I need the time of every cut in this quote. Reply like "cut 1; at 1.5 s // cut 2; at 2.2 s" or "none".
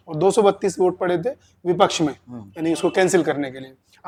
none